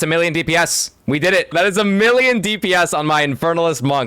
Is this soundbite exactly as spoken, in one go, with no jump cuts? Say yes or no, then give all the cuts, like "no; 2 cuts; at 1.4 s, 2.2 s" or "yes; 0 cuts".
no; 1 cut; at 1.5 s